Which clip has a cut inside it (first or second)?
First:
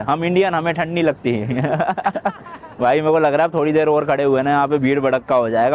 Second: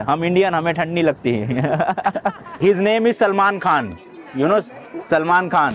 second